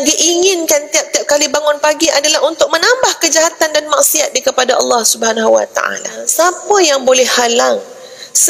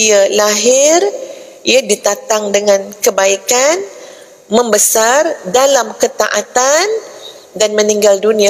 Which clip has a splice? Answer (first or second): first